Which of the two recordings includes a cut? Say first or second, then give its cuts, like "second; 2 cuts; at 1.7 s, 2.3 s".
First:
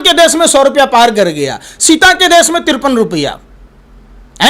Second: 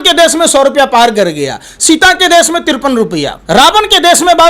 second; 1 cut; at 3.4 s